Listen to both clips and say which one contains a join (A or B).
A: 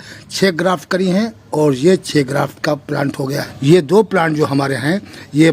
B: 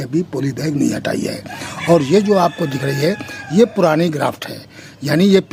A